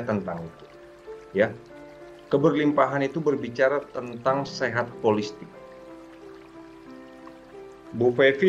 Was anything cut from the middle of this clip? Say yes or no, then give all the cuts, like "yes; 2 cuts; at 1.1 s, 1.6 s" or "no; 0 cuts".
no; 0 cuts